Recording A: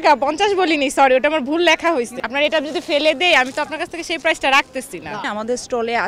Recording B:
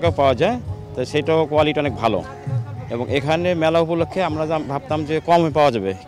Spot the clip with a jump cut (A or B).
A